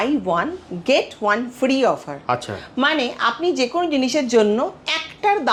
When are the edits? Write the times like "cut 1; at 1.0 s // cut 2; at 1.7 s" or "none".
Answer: none